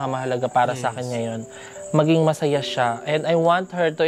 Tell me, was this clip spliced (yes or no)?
no